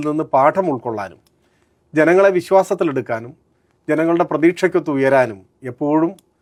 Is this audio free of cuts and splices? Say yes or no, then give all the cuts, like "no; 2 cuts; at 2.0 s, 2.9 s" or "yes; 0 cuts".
yes; 0 cuts